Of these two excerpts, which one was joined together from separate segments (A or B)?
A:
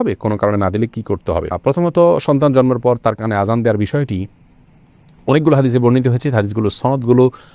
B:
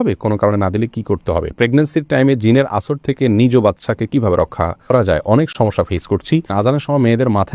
B